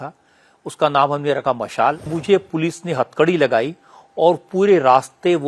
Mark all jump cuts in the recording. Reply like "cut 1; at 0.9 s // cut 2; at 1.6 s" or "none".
cut 1; at 2.1 s